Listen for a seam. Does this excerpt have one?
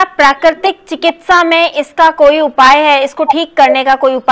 no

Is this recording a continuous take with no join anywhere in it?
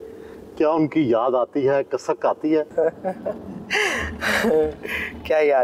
no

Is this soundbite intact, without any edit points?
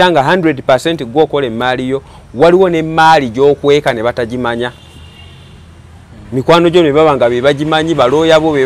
yes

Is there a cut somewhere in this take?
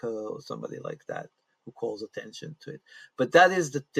no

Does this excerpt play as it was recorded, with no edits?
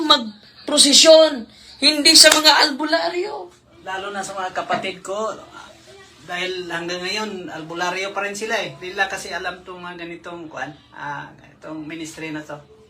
no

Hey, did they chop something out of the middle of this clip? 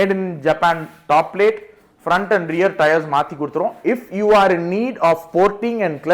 no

